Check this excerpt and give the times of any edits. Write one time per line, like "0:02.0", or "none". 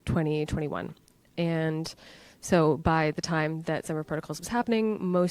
0:01.3